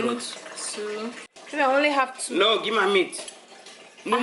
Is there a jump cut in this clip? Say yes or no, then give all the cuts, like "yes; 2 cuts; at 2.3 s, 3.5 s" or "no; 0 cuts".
yes; 1 cut; at 1.4 s